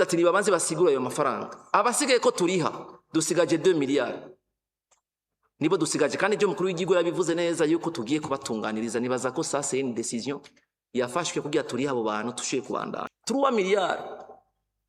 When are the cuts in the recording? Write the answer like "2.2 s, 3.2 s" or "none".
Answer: 13.1 s